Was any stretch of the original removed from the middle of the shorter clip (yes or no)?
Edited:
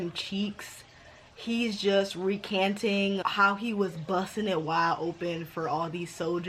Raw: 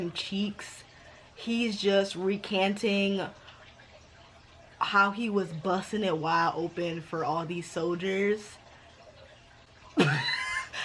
yes